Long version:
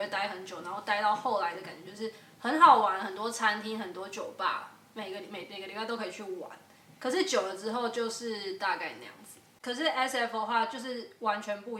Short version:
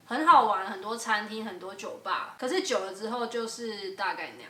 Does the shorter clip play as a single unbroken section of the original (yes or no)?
no